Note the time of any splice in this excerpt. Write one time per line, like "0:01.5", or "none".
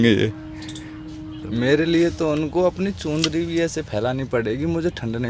0:01.3